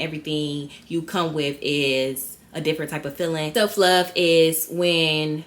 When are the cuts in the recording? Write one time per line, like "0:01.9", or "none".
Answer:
0:03.5